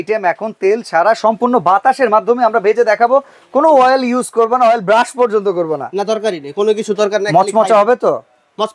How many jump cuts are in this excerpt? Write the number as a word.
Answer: zero